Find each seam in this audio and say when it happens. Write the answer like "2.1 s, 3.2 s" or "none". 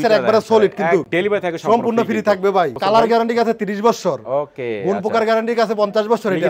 1.1 s, 2.7 s